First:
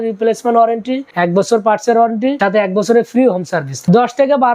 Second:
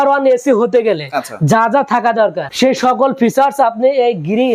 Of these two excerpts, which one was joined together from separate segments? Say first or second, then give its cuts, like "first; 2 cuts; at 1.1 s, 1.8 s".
first; 3 cuts; at 1.0 s, 2.4 s, 3.8 s